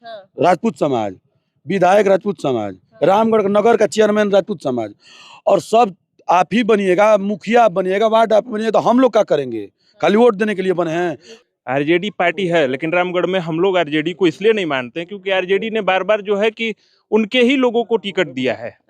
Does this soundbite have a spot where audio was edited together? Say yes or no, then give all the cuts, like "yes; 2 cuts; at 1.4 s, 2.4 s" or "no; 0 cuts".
yes; 2 cuts; at 2.9 s, 11.3 s